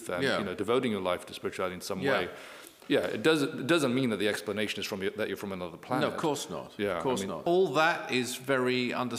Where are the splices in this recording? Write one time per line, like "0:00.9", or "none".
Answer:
0:07.5